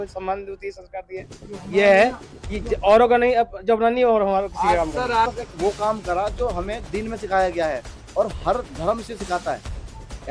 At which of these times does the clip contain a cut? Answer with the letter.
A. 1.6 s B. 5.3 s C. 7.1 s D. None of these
B